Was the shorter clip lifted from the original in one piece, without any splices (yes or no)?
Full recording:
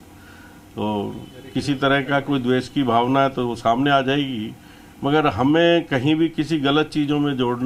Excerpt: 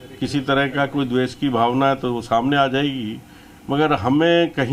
yes